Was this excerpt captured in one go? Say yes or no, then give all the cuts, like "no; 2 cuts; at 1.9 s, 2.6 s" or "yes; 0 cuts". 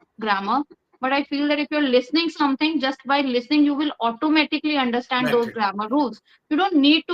yes; 0 cuts